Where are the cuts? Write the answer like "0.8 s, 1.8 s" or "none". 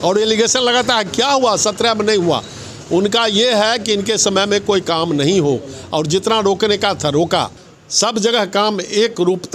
7.6 s